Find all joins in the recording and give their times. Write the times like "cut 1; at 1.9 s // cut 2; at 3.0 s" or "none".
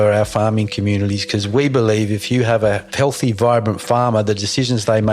cut 1; at 2.9 s